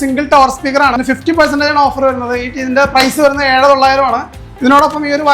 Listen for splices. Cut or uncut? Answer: cut